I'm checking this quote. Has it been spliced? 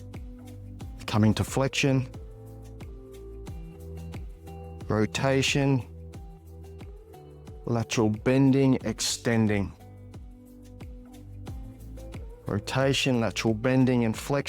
yes; 7 cuts; at 1.0 s, 2.7 s, 4.8 s, 5.9 s, 7.6 s, 10.3 s, 12.4 s

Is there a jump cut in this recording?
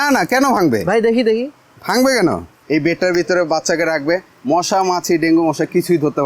yes; 1 cut; at 2.6 s

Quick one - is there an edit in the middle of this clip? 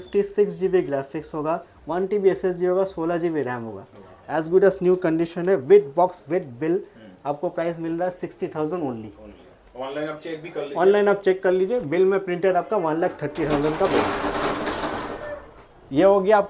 no; 0 cuts

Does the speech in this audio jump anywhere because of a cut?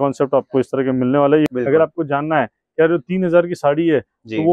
yes; 1 cut; at 1.5 s

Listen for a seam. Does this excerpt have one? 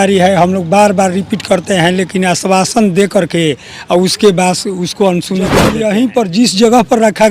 yes; 1 cut; at 5.6 s

